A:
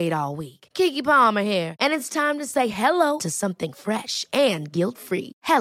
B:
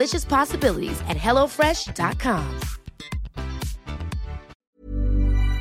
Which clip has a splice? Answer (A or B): B